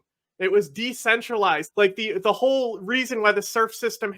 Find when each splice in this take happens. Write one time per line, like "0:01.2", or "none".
0:01.7